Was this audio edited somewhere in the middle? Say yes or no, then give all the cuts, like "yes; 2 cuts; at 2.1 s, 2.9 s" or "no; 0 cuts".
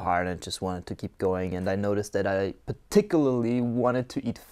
no; 0 cuts